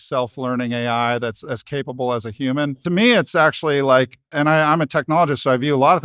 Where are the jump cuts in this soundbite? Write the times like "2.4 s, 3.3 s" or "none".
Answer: 2.8 s, 4.3 s